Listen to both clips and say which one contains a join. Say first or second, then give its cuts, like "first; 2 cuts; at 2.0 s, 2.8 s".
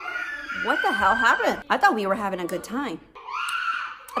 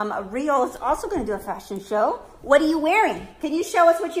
first; 2 cuts; at 1.6 s, 3.2 s